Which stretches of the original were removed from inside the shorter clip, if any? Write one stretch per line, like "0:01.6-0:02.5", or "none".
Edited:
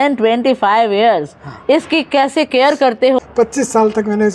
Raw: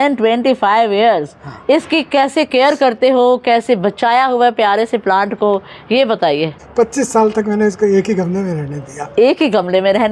0:03.2-0:06.6